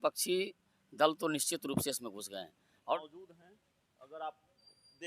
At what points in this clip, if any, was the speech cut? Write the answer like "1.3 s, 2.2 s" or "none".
2.9 s

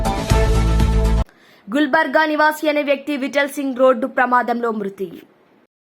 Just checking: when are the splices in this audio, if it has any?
1.2 s

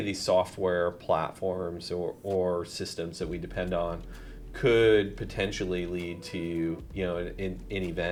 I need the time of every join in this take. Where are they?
none

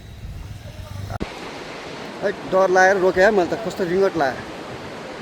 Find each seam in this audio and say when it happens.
1.2 s

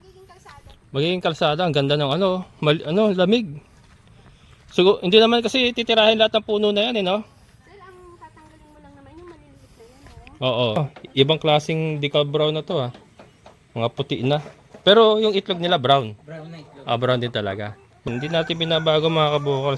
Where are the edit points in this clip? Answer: 10.8 s, 18.1 s

